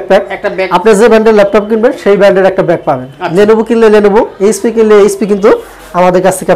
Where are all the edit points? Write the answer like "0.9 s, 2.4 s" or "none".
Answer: none